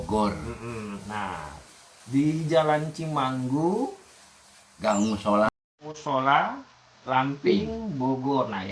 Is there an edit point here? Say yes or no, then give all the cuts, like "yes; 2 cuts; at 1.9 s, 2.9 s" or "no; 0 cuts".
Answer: no; 0 cuts